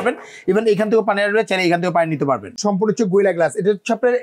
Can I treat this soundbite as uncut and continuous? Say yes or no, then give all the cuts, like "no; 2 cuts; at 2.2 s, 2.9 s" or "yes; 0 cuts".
no; 1 cut; at 2.6 s